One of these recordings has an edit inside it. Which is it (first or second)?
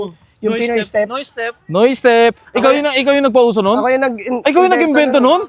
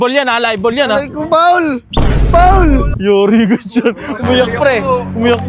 second